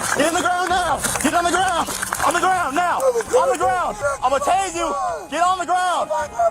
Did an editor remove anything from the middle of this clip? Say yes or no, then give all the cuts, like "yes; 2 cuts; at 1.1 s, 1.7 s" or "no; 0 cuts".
no; 0 cuts